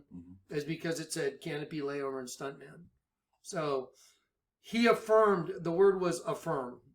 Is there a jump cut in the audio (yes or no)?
yes